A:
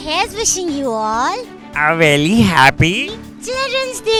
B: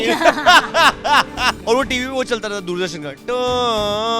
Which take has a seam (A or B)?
B